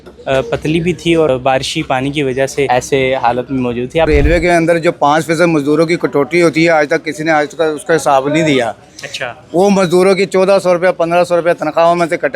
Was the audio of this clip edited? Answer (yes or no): yes